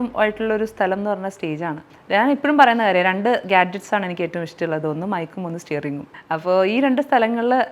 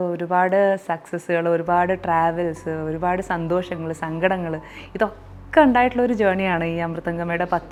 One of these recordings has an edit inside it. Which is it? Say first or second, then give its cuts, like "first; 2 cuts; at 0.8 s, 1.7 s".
first; 2 cuts; at 1.9 s, 6.2 s